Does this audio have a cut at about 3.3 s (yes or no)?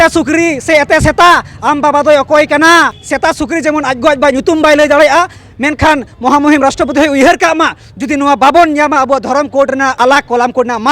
yes